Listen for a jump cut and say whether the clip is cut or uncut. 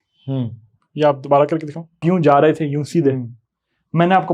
cut